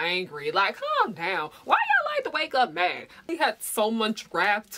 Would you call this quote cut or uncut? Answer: cut